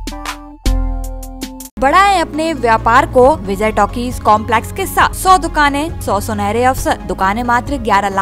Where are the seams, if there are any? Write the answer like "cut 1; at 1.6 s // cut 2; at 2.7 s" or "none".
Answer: cut 1; at 1.8 s // cut 2; at 3.5 s // cut 3; at 5.2 s // cut 4; at 6.0 s // cut 5; at 7.1 s

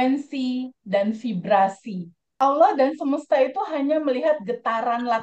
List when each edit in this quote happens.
cut 1; at 2.4 s

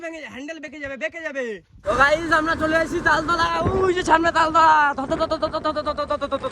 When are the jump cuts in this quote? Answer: cut 1; at 1.8 s

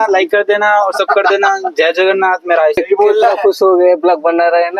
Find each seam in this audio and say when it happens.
cut 1; at 2.8 s

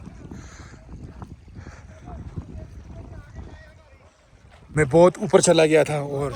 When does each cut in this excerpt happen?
cut 1; at 4.7 s

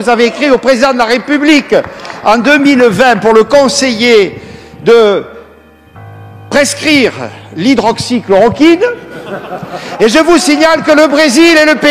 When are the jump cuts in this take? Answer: cut 1; at 9.8 s

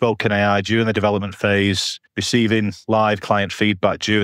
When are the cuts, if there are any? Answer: none

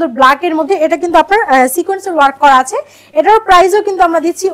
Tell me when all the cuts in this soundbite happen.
none

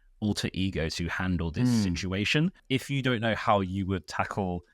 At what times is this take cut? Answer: cut 1; at 2.6 s

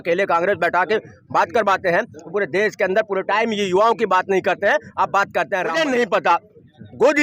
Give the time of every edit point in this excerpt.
cut 1; at 5.7 s

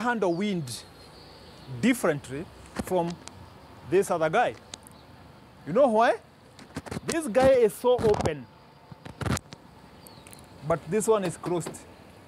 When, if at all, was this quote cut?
none

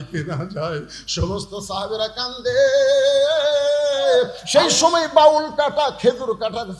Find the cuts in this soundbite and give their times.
cut 1; at 4.4 s

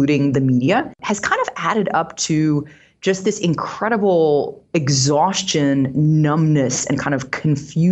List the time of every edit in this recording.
none

